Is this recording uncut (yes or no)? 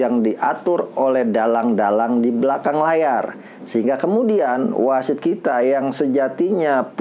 yes